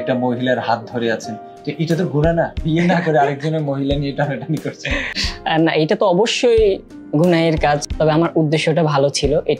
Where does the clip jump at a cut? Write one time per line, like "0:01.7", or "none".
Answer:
0:02.6
0:05.3
0:07.9